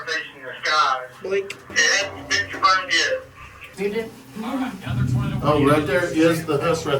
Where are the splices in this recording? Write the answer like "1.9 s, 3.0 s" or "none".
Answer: 1.6 s, 3.7 s